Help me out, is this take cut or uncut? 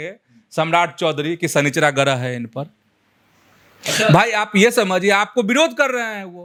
uncut